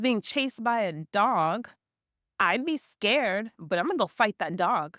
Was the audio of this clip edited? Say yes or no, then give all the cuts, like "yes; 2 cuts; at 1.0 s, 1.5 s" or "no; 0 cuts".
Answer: no; 0 cuts